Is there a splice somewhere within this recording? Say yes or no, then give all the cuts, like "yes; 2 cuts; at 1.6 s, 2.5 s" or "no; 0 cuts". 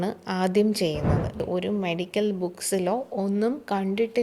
yes; 1 cut; at 1.4 s